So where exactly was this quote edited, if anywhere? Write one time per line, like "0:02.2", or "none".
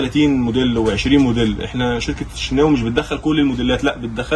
none